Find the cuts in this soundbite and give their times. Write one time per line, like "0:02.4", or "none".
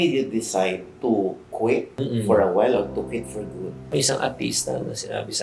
0:03.9